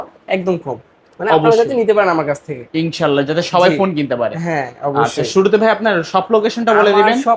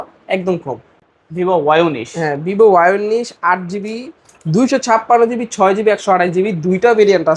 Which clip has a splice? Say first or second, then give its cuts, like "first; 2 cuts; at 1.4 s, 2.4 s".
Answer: second; 1 cut; at 1.0 s